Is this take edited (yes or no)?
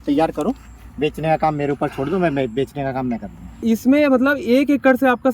yes